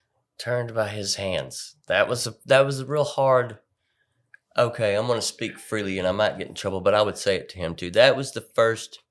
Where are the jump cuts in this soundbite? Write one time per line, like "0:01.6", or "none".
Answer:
none